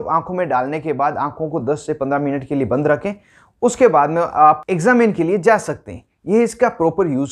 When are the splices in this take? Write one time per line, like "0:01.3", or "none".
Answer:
none

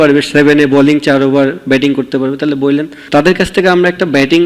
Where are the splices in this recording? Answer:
0:03.0

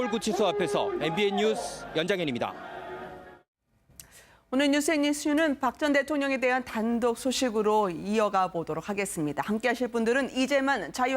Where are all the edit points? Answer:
0:02.7

